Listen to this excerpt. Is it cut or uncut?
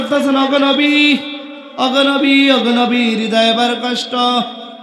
uncut